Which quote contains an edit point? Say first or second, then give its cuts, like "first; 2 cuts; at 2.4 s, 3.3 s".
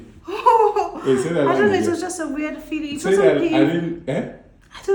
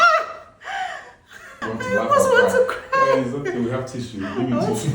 second; 1 cut; at 1.6 s